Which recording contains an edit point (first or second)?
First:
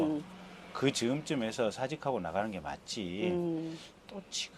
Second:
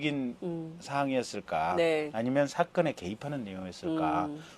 second